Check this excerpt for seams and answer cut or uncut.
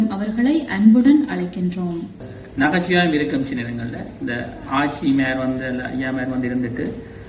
cut